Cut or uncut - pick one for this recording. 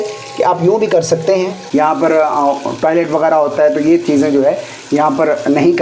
cut